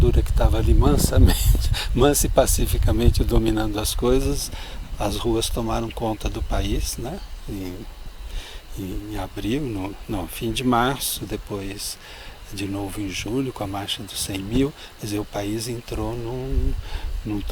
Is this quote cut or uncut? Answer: uncut